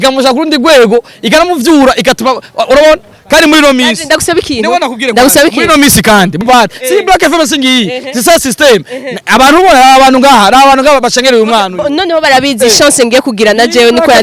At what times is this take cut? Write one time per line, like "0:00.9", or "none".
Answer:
0:06.4